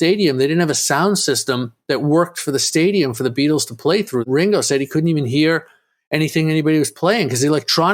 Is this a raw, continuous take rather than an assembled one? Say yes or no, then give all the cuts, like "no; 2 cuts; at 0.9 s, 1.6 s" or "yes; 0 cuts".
no; 1 cut; at 4.3 s